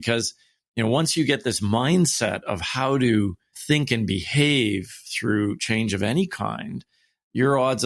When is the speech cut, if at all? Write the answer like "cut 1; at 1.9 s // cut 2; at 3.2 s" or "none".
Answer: cut 1; at 3.6 s